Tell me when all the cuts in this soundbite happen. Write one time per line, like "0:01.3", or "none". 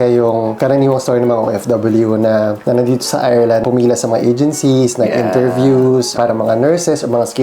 0:03.6
0:06.1